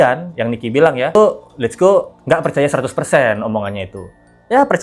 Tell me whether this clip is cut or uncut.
cut